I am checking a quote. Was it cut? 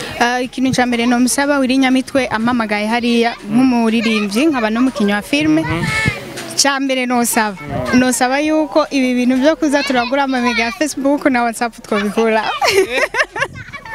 no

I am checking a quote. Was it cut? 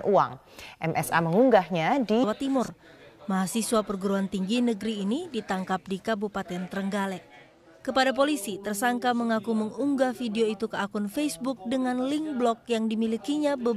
no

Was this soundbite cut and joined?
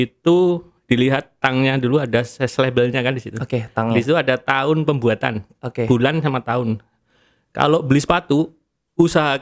no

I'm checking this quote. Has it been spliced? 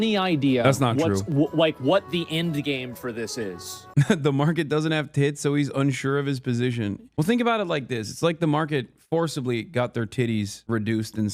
yes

